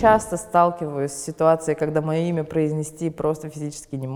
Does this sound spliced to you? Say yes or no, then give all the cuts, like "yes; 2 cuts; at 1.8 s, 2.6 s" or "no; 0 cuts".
no; 0 cuts